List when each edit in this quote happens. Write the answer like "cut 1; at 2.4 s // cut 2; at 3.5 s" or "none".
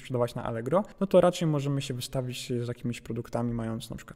cut 1; at 0.9 s